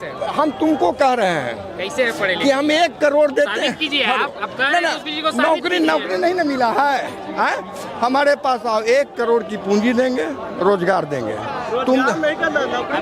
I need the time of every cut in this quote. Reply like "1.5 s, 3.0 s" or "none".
none